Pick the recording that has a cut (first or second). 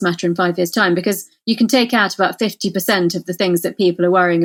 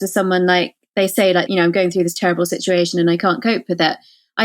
second